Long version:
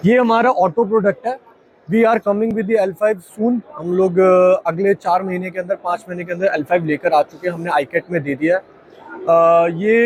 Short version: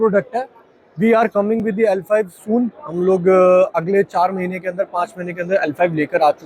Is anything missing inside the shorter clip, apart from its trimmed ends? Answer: no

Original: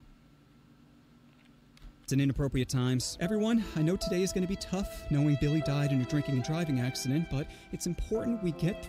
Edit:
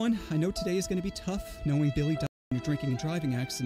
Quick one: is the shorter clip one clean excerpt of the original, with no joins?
yes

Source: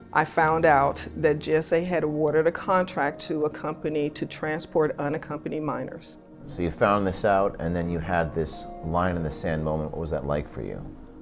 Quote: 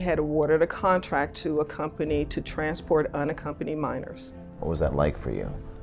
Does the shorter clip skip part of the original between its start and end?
yes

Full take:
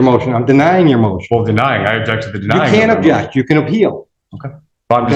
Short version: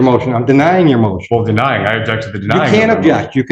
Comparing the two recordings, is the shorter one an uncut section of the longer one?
yes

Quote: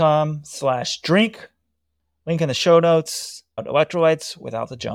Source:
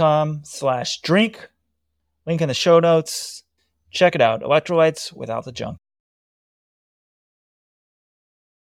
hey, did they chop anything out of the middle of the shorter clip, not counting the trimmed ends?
yes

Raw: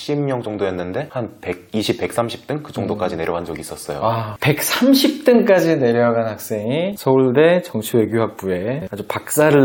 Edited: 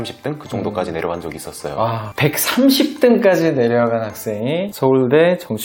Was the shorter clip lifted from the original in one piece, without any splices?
yes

